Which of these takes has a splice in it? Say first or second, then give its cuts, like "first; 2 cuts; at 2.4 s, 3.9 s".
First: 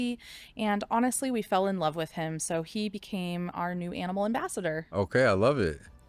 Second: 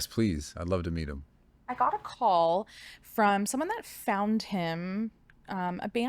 second; 1 cut; at 1.6 s